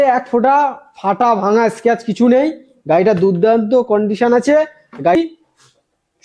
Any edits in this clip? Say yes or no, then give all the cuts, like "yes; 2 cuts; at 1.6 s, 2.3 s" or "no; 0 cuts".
yes; 1 cut; at 5.2 s